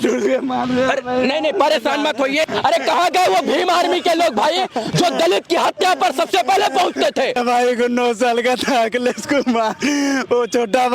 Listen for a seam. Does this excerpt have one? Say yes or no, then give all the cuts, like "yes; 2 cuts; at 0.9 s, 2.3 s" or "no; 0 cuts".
yes; 2 cuts; at 2.5 s, 7.4 s